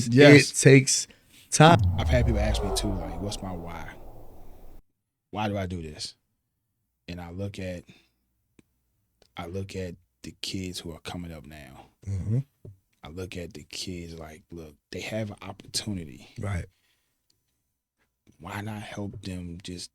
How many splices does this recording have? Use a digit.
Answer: 1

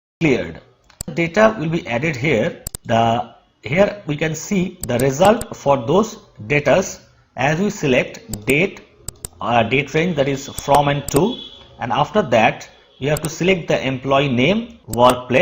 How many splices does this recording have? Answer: 2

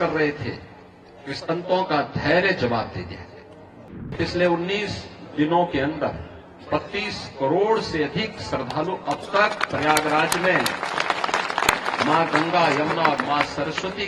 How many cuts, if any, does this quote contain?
1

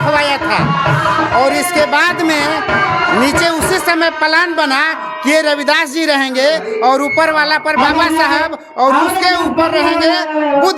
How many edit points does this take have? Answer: 0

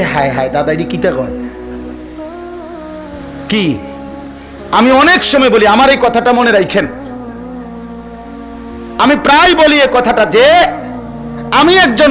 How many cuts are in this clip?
2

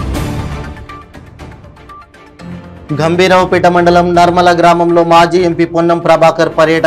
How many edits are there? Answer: 1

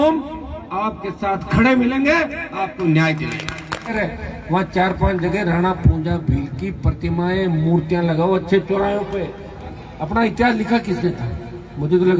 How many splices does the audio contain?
2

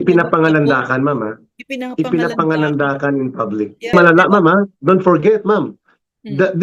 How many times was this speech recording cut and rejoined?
1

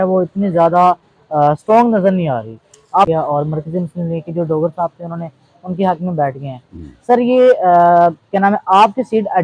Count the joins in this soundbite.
1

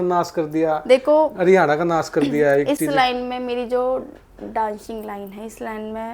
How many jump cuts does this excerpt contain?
0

